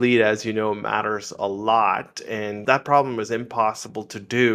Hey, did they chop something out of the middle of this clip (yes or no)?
yes